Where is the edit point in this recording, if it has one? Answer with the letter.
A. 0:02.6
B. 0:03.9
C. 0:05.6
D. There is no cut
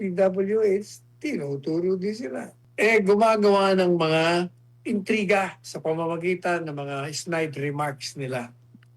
A